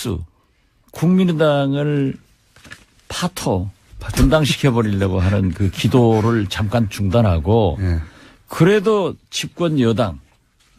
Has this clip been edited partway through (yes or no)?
no